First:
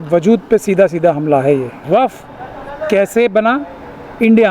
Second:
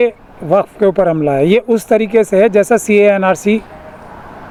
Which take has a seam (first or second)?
first